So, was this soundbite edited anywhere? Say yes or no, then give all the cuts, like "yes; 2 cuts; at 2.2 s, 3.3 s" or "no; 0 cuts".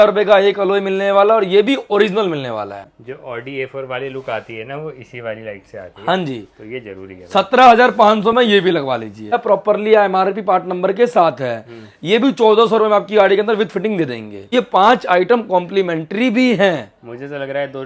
yes; 3 cuts; at 2.8 s, 9.4 s, 14.4 s